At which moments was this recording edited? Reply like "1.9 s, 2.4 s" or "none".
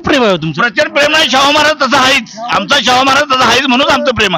none